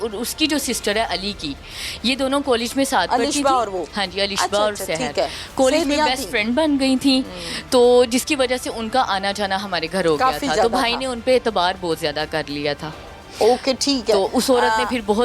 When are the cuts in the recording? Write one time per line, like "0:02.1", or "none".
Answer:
none